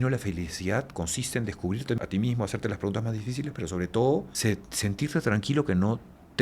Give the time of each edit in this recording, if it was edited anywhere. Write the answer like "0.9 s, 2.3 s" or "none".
2.0 s, 4.3 s